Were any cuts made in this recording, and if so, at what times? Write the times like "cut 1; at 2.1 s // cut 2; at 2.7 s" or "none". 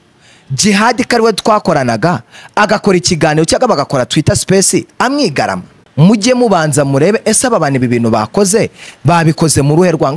cut 1; at 5.8 s

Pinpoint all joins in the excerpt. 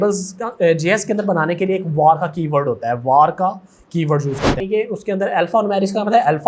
cut 1; at 4.6 s

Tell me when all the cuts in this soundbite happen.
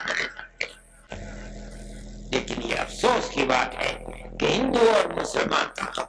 none

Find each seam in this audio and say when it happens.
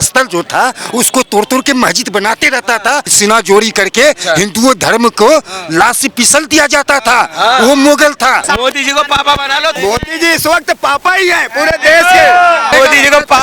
cut 1; at 3.1 s // cut 2; at 8.5 s // cut 3; at 9.8 s // cut 4; at 12.7 s

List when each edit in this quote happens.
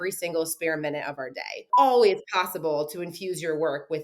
cut 1; at 1.6 s

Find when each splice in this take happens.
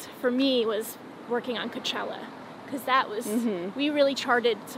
none

